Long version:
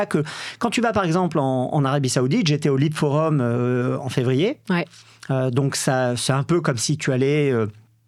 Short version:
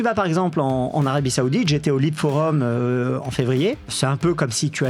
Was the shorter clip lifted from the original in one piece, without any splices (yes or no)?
no